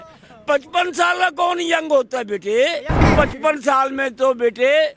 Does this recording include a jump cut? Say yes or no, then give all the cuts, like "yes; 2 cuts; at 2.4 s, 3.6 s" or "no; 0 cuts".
yes; 1 cut; at 3.1 s